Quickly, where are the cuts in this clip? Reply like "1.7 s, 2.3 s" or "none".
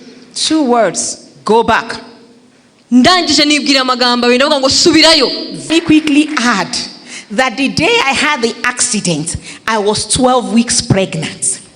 5.7 s